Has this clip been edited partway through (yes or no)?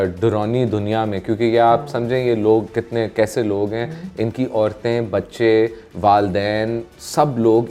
no